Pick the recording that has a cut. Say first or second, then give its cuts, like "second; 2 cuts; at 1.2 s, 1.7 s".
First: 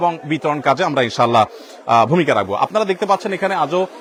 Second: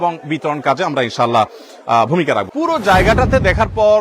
second; 1 cut; at 2.5 s